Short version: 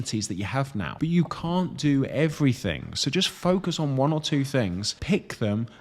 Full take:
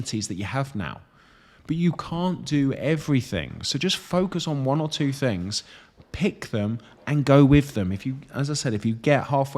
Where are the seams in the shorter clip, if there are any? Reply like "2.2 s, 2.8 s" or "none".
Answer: 0.9 s, 4.9 s